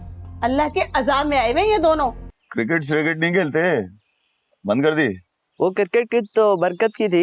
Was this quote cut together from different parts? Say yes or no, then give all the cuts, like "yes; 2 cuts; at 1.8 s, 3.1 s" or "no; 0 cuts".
yes; 1 cut; at 2.3 s